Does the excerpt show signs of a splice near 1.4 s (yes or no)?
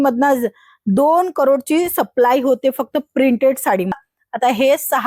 no